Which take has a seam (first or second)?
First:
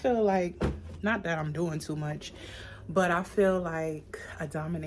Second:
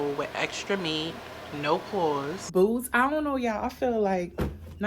second